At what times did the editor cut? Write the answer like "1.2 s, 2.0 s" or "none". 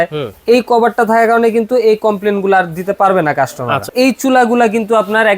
3.9 s